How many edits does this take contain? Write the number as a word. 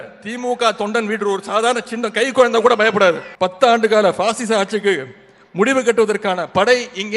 one